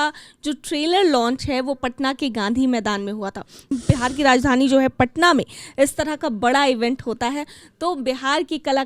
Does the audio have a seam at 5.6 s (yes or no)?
no